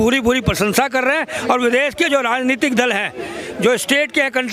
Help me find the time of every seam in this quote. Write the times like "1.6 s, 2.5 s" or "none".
none